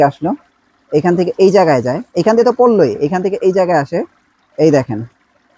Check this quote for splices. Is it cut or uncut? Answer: uncut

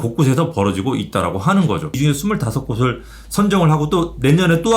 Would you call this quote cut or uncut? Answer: cut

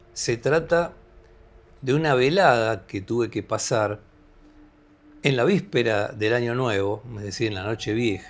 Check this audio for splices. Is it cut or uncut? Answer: uncut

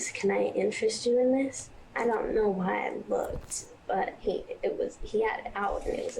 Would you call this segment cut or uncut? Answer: cut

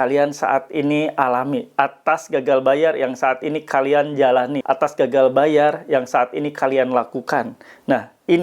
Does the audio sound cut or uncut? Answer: cut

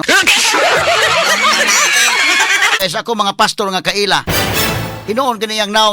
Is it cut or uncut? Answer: cut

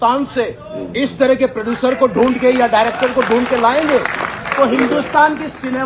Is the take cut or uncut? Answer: uncut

